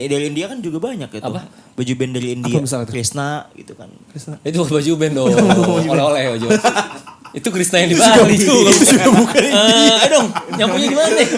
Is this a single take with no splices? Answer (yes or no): yes